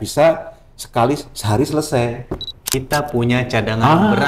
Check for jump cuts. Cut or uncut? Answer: cut